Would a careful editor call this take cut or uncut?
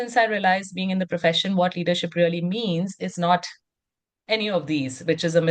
uncut